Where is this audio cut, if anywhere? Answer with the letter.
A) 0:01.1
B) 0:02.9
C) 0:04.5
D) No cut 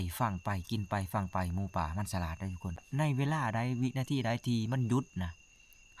B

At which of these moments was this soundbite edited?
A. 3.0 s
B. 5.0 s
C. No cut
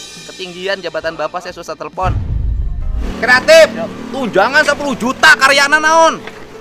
A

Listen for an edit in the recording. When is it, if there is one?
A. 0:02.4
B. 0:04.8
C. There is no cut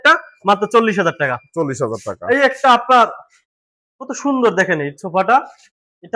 C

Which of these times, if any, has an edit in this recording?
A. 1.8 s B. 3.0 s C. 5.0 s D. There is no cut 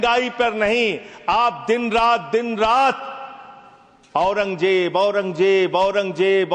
D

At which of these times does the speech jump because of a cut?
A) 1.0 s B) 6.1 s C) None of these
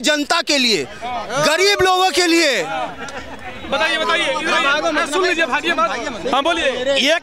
C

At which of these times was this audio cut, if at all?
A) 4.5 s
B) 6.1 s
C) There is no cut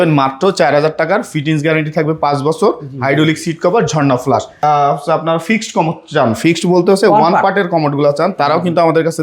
A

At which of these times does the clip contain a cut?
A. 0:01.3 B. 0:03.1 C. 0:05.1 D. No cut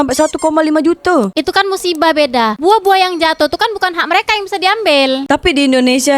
A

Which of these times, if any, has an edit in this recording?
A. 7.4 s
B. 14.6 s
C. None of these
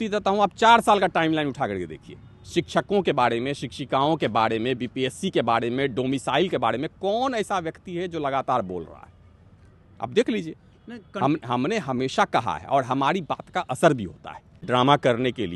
B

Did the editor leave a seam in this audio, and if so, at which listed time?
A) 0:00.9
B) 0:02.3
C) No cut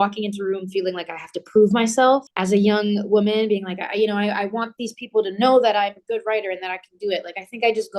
B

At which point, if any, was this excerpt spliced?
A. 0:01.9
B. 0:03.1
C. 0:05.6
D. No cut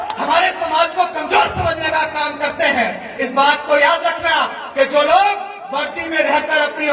B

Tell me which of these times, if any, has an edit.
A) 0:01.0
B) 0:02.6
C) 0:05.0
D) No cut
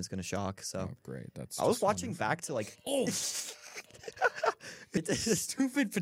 C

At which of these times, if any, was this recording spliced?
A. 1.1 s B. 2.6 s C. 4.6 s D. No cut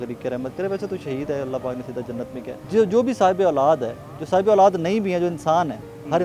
B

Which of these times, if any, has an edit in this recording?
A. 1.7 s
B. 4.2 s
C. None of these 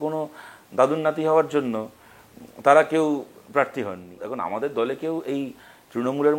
B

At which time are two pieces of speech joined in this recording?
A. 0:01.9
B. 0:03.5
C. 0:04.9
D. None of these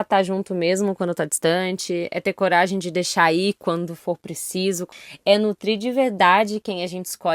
C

